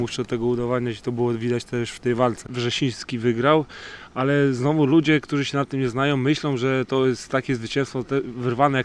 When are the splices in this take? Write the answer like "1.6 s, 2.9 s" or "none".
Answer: 2.5 s